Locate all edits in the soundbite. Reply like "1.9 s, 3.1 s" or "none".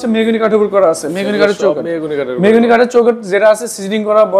none